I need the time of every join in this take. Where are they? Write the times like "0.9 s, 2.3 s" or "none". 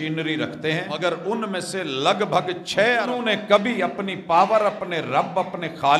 0.9 s, 3.1 s